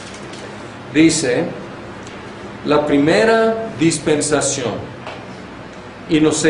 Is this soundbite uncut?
yes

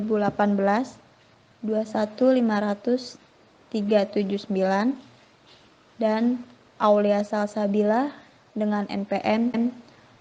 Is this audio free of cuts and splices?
no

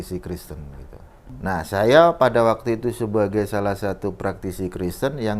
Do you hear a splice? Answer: yes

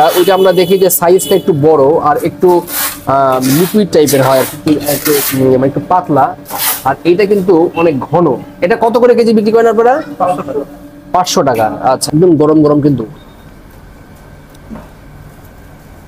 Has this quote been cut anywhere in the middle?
yes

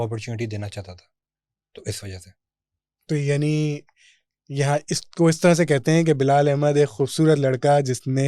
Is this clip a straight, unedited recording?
yes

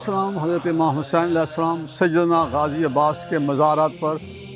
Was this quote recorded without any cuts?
yes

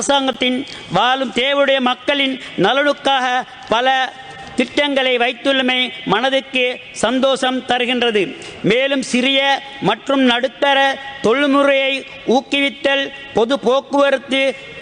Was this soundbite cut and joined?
no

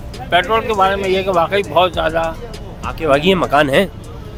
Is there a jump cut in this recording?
no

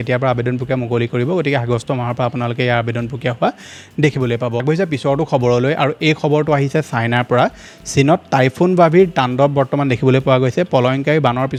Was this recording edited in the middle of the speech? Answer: no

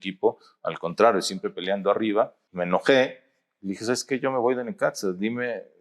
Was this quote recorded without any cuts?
no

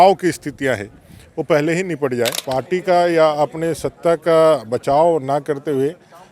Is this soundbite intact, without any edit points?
no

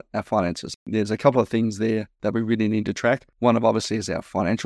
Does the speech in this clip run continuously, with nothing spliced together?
no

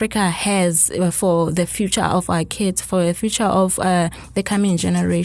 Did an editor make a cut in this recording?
no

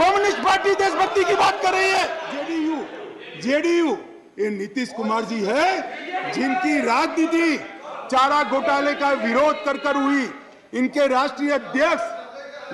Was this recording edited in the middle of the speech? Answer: yes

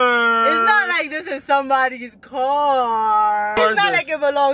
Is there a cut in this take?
yes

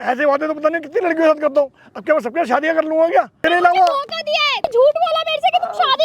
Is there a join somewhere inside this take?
yes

